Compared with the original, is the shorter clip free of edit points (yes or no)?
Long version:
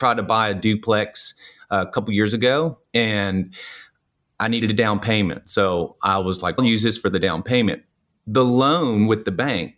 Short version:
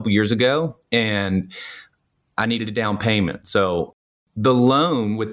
no